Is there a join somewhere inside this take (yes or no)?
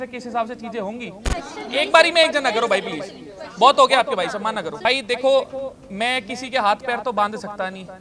yes